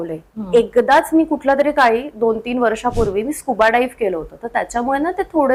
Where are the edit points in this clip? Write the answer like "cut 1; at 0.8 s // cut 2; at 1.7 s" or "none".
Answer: none

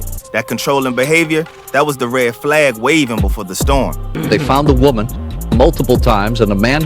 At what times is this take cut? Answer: cut 1; at 4.1 s

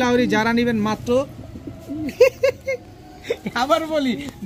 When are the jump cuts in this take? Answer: none

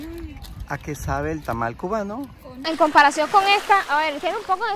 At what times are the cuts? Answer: cut 1; at 2.5 s

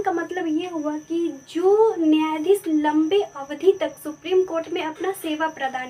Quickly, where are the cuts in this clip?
none

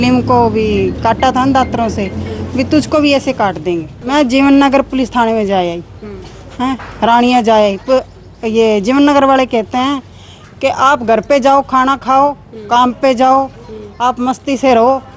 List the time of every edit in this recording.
cut 1; at 3.9 s

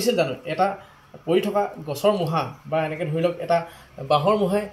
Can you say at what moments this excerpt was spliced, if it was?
none

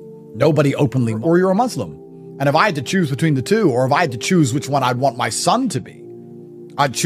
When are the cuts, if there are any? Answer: cut 1; at 1.2 s

